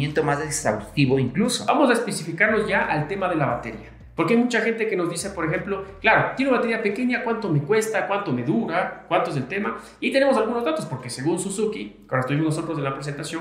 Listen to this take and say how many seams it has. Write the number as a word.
one